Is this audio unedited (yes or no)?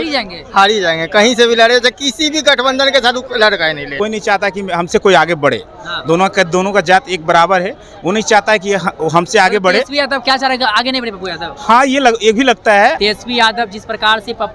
no